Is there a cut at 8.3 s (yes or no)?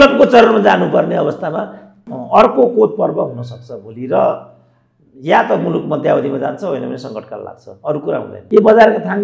yes